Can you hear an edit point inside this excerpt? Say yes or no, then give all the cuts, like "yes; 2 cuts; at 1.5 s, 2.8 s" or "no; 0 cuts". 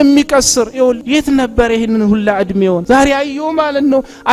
yes; 2 cuts; at 1.0 s, 2.8 s